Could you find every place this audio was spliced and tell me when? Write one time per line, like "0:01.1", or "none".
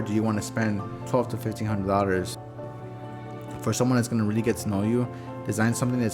0:00.9
0:02.5

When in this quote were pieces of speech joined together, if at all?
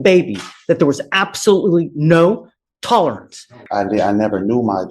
0:03.6

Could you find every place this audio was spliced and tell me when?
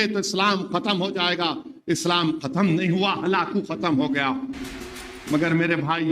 0:05.1

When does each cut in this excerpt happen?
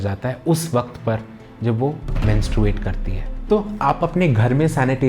0:03.3

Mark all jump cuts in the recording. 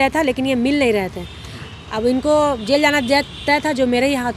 none

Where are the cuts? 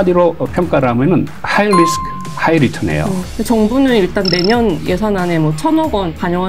0:01.4
0:03.2

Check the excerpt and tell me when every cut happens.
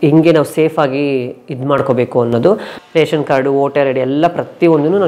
0:02.8

